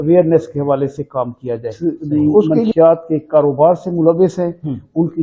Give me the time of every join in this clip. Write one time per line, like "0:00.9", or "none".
0:02.7